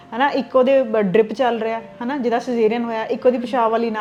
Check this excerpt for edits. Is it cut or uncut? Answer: uncut